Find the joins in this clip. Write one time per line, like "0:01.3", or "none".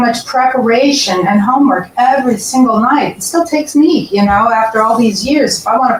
none